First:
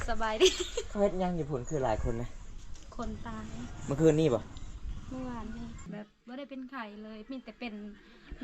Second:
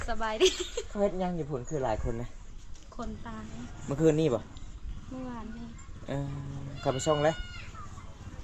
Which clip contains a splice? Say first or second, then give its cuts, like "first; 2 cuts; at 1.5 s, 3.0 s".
first; 1 cut; at 5.9 s